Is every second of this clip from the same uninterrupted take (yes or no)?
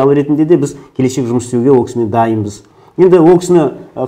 yes